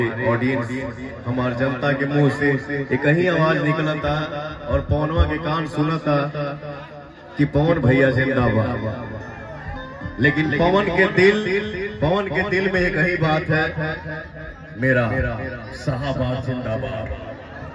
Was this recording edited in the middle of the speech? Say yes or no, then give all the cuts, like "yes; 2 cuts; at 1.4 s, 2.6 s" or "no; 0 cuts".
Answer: no; 0 cuts